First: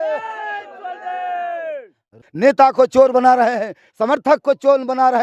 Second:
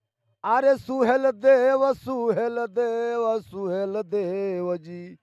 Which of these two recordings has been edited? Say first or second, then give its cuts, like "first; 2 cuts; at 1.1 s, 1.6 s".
first; 1 cut; at 2.2 s